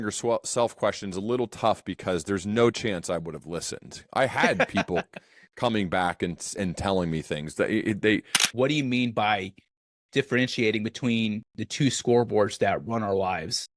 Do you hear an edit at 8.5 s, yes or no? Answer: yes